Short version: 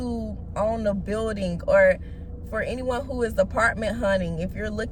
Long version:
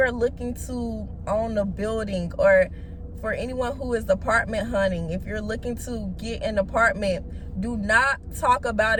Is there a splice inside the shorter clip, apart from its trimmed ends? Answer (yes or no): no